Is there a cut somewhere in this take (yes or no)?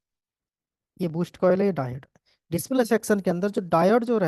no